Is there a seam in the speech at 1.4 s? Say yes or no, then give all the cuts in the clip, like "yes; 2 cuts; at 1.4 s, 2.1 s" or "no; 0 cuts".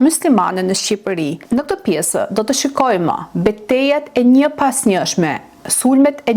yes; 1 cut; at 1.4 s